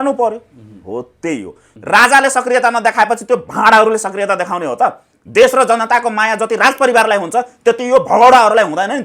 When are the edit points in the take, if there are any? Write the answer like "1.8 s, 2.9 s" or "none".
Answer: 1.7 s